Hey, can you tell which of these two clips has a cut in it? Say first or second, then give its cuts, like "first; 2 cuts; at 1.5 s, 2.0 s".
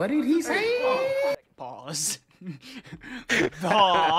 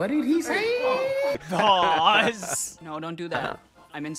second; 2 cuts; at 1.5 s, 2.7 s